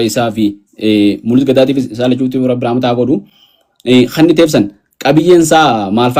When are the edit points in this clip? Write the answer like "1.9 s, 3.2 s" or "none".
none